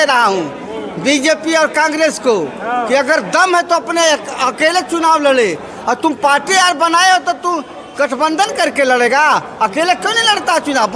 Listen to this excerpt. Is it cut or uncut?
uncut